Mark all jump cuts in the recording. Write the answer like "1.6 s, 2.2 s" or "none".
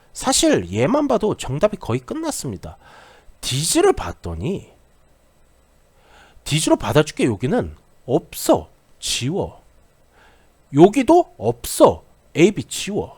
12.2 s